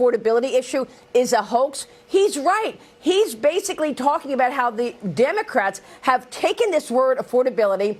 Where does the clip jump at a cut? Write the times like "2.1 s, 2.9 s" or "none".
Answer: none